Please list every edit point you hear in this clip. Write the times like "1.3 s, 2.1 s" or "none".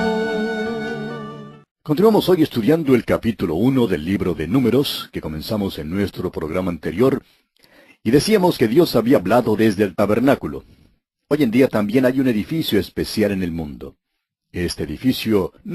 6.8 s